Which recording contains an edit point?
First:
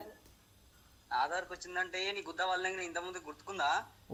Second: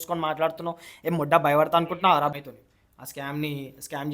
second; 1 cut; at 2.4 s

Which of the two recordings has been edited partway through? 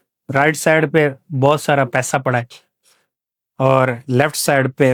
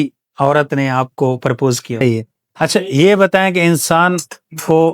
second; 1 cut; at 2.0 s

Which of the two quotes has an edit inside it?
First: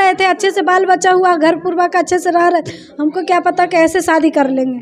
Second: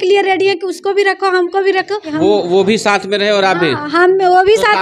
second; 1 cut; at 2.1 s

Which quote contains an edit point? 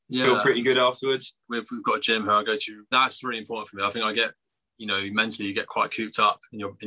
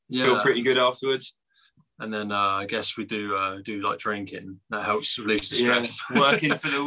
first; 2 cuts; at 1.4 s, 2.9 s

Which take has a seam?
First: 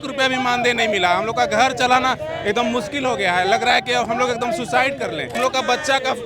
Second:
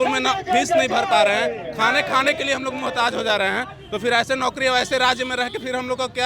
first; 1 cut; at 5.3 s

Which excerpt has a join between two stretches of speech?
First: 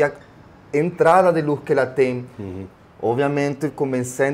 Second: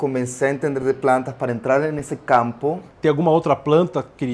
second; 1 cut; at 2.9 s

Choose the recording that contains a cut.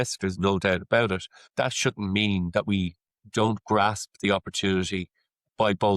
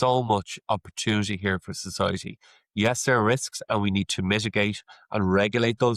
first; 1 cut; at 1.4 s

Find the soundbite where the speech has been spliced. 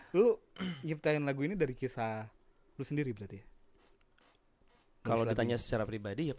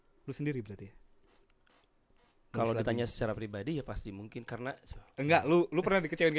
second; 1 cut; at 4.8 s

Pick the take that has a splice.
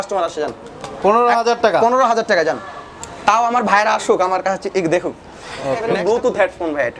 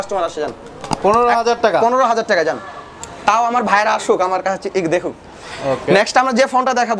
first; 1 cut; at 5.8 s

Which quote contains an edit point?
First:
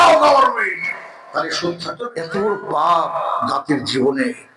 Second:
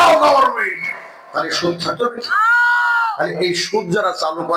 first; 1 cut; at 2.0 s

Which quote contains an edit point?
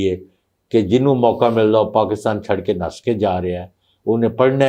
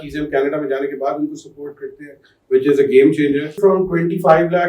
second; 1 cut; at 3.6 s

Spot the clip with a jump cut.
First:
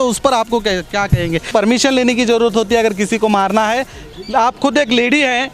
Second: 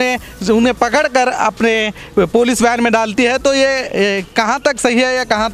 first; 2 cuts; at 1.5 s, 4.0 s

